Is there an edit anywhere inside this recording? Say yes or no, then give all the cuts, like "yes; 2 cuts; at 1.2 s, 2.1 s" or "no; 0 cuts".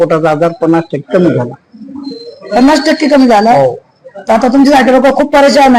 no; 0 cuts